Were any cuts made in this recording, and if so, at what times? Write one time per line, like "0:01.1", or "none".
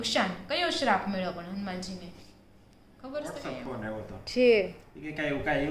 0:03.6